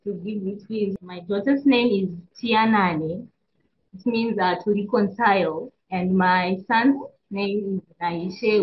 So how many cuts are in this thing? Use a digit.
1